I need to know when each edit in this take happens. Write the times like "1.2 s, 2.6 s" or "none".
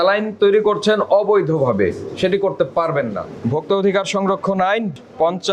3.2 s